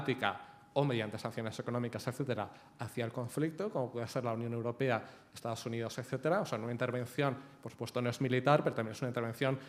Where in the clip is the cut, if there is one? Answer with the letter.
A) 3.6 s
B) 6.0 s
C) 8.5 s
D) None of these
D